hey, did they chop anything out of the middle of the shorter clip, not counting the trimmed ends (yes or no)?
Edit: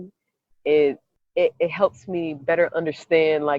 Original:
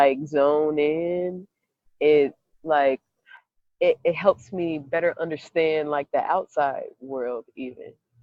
yes